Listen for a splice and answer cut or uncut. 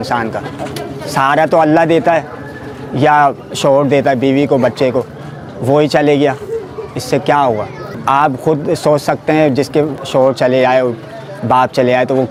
uncut